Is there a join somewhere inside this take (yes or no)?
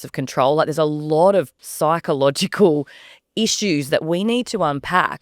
yes